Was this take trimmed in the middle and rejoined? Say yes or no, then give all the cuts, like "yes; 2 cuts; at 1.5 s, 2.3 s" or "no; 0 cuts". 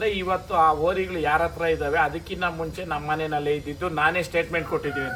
no; 0 cuts